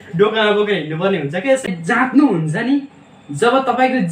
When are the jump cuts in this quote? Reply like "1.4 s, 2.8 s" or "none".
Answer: 1.7 s